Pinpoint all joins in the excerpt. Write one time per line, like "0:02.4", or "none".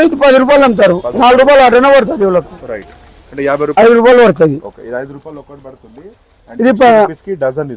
0:03.7